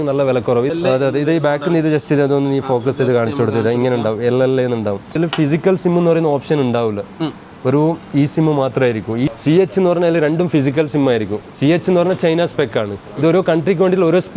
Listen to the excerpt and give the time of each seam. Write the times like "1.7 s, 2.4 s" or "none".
0.7 s, 5.2 s, 9.3 s, 11.4 s